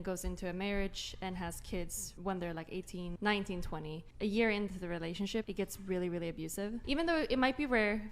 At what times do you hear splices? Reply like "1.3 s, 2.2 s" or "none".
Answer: 2.0 s, 3.1 s, 4.0 s, 5.5 s, 6.8 s